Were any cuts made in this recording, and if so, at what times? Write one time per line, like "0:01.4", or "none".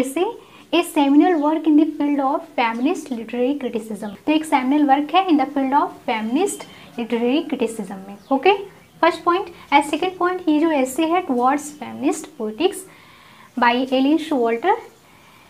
none